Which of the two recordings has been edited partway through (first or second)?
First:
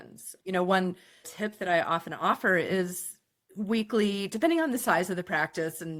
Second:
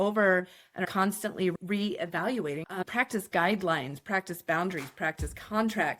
second